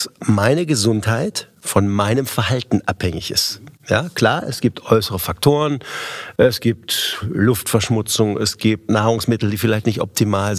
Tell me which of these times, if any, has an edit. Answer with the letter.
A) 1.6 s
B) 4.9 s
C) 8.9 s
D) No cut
C